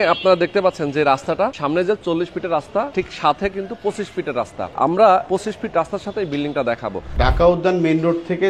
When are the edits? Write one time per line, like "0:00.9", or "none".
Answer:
0:01.6
0:02.9
0:04.7
0:05.2
0:07.0